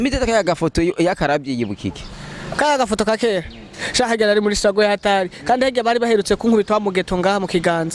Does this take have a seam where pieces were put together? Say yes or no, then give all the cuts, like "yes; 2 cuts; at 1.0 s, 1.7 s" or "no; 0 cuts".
no; 0 cuts